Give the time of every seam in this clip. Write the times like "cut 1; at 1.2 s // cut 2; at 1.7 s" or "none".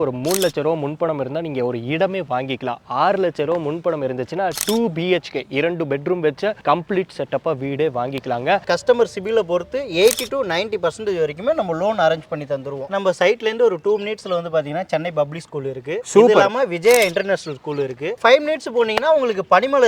cut 1; at 8.6 s // cut 2; at 12.9 s